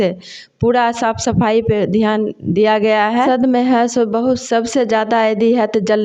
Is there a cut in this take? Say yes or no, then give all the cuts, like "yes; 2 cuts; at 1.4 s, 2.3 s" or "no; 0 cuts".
yes; 1 cut; at 3.1 s